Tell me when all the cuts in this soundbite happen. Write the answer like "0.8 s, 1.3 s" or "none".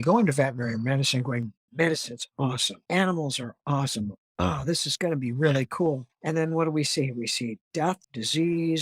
1.6 s